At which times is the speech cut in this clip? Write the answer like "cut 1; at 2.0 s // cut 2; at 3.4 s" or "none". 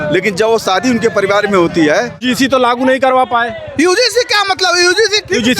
cut 1; at 2.2 s

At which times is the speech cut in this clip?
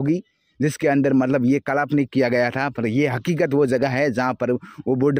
none

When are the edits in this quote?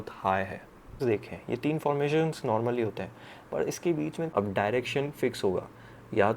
cut 1; at 1.0 s // cut 2; at 4.2 s

